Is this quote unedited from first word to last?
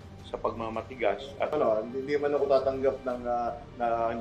no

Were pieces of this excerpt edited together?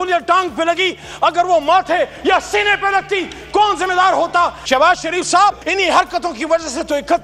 yes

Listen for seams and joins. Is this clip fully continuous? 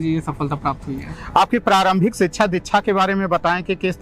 yes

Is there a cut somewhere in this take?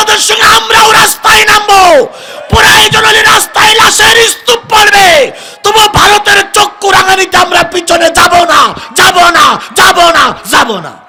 no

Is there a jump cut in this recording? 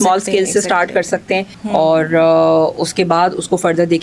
yes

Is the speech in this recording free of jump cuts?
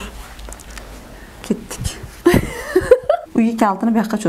no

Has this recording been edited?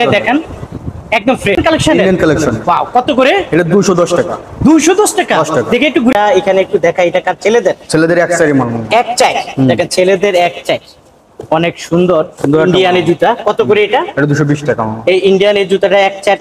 yes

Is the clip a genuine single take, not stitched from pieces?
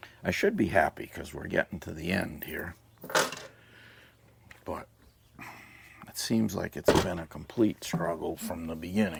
yes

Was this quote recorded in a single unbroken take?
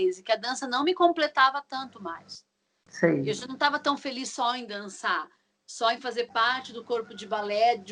yes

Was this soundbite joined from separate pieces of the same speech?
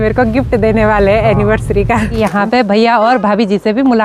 yes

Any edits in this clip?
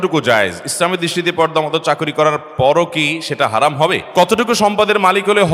yes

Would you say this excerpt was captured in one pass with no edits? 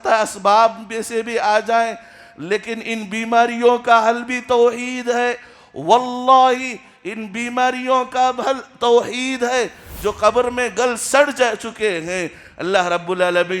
no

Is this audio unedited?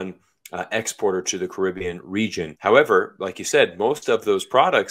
yes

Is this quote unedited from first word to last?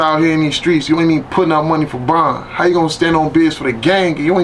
yes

